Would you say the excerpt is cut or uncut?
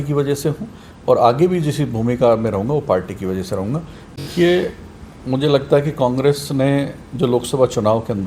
cut